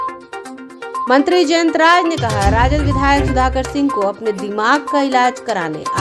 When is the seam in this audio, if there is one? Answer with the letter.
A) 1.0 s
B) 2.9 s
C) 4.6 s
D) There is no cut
A